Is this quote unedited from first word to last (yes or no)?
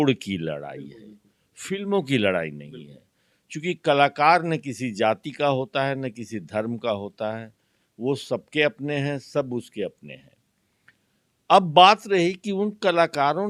yes